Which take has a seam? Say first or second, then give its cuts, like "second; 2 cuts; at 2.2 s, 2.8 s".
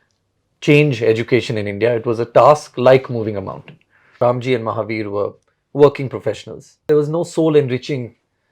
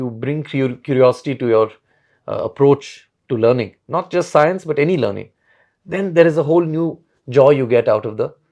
first; 2 cuts; at 4.0 s, 6.8 s